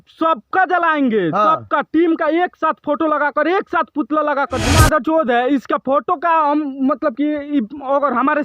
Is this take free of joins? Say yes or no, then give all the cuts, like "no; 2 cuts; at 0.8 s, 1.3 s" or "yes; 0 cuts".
no; 1 cut; at 4.8 s